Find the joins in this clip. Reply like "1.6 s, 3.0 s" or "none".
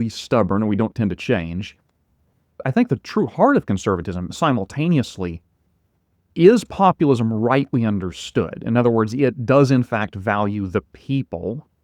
2.6 s